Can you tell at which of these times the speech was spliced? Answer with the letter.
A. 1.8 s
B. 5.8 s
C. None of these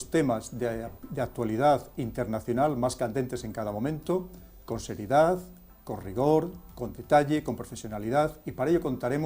C